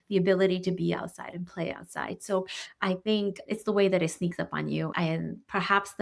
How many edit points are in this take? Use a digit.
1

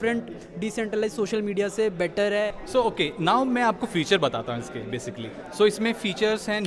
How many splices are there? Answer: 1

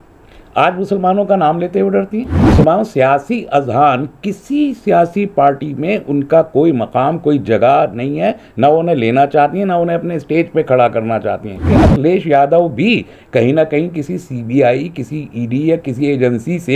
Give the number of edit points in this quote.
2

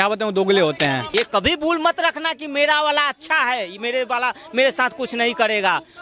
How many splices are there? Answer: 1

